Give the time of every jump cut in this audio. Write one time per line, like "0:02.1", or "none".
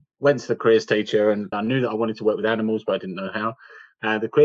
0:01.5